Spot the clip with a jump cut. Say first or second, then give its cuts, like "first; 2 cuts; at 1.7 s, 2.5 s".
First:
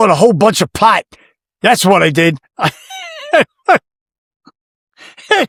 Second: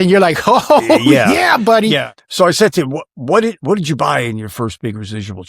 second; 1 cut; at 2.1 s